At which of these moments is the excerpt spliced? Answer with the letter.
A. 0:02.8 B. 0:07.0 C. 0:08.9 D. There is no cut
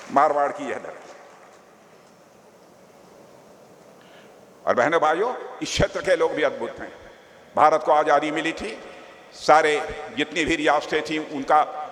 D